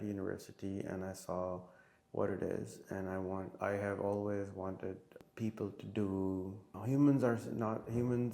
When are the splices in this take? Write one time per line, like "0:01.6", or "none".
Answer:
0:05.2
0:06.8